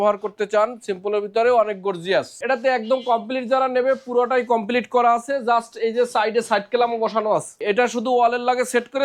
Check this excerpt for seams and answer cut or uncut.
cut